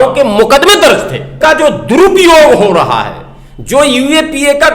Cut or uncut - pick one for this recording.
cut